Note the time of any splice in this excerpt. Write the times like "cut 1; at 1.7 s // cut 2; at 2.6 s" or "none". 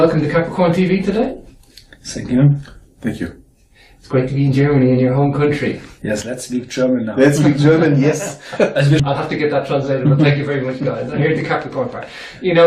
none